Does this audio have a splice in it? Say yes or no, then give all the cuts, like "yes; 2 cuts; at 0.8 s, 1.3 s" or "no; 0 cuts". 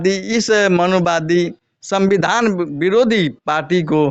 no; 0 cuts